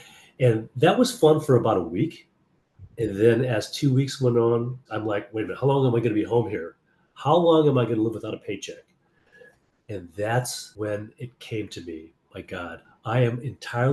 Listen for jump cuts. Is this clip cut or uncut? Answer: cut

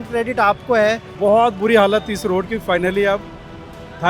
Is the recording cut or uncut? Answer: cut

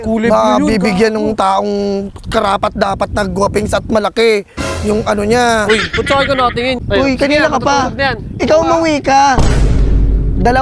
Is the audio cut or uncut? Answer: cut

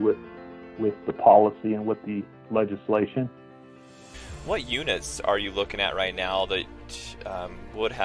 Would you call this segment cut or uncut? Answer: cut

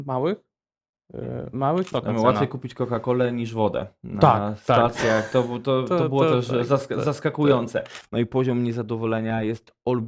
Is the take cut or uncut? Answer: cut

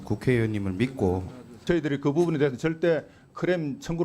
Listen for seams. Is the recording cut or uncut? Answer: cut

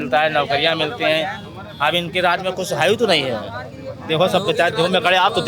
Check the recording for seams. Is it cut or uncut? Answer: uncut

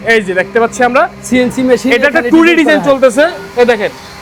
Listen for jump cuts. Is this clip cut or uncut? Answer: uncut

